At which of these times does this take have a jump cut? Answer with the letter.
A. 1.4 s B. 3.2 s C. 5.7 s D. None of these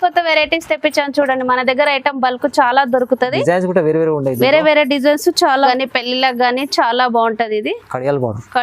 C